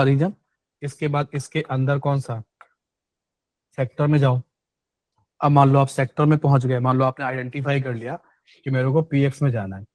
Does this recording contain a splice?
no; 0 cuts

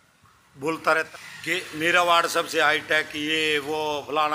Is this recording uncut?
no; 1 cut; at 1.1 s

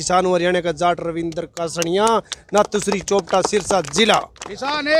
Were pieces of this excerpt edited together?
no; 0 cuts

